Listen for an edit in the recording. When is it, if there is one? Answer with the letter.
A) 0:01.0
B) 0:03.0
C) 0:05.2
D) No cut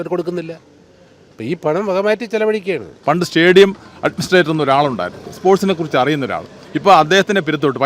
B